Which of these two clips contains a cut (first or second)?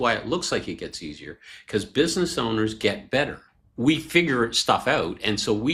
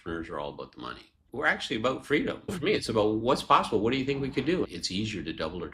second